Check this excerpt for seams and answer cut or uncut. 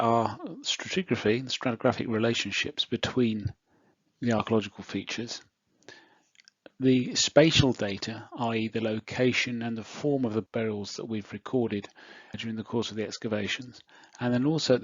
cut